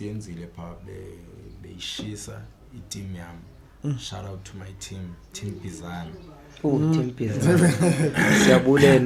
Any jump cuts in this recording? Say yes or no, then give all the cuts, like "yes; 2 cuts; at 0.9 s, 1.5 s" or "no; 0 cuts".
no; 0 cuts